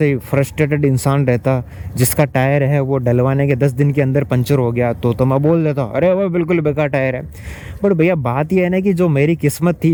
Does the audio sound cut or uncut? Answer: uncut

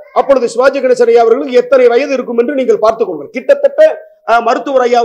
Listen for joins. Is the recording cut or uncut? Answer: uncut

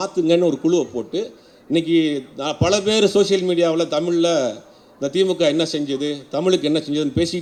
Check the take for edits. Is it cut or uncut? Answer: uncut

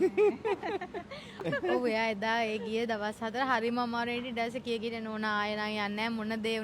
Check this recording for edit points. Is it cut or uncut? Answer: cut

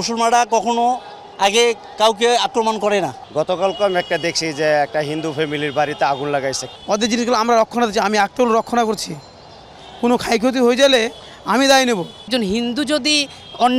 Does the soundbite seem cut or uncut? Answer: cut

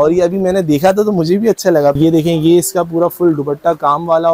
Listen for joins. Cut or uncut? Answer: cut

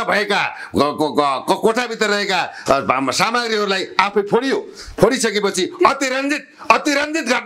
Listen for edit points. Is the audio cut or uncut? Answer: uncut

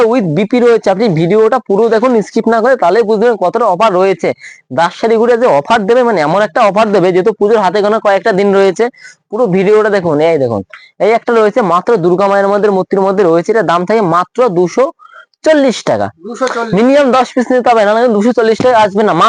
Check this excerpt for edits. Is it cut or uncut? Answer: uncut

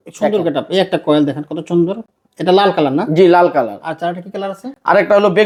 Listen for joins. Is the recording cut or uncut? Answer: uncut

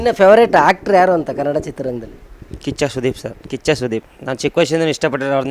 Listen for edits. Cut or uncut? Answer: cut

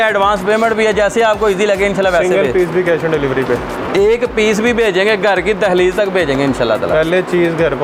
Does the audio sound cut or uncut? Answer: uncut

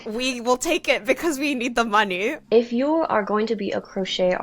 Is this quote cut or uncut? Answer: cut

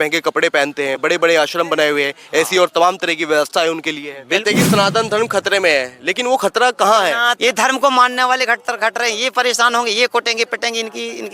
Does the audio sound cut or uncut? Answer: cut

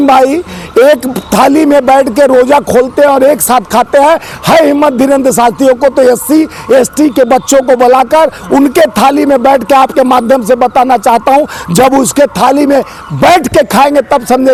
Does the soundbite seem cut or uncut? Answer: uncut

